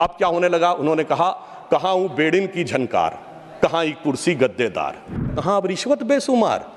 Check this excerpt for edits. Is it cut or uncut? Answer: cut